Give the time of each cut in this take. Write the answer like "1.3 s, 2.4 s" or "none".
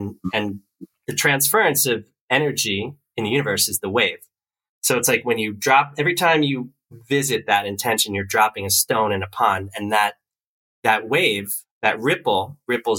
none